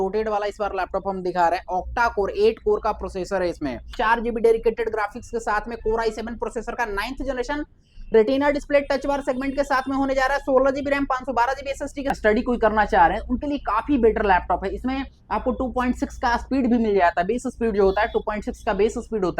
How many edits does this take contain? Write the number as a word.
two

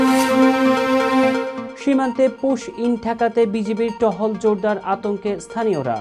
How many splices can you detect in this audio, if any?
one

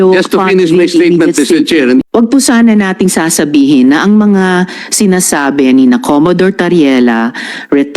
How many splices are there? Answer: one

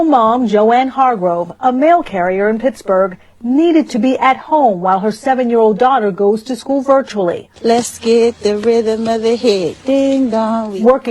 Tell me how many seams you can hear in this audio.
one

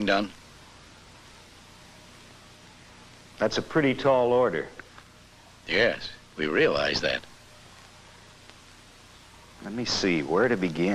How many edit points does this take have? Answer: zero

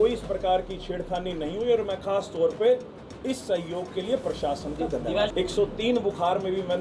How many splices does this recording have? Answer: one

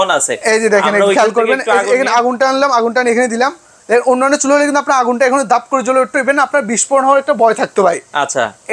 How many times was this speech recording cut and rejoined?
zero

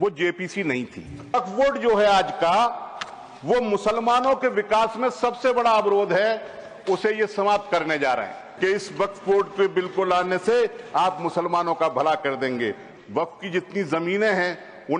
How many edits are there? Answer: three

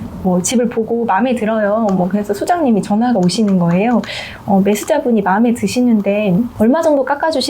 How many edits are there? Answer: one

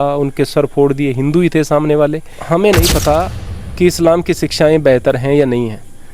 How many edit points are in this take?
one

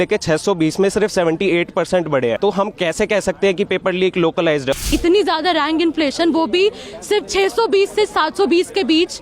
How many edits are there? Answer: two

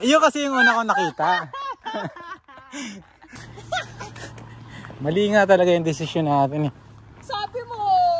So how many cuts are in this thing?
one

